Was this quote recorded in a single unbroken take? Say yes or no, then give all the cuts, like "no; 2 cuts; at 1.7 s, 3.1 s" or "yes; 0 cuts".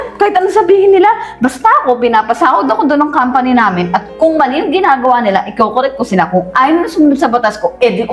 yes; 0 cuts